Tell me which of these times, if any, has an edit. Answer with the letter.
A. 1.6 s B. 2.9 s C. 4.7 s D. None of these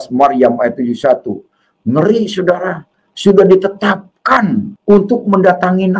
C